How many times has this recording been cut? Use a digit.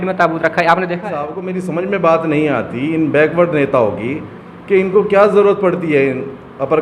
1